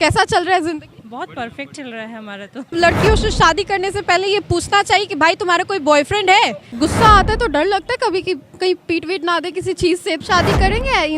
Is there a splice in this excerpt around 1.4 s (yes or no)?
no